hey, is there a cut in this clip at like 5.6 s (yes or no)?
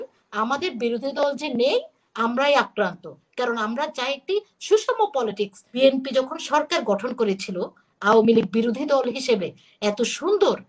yes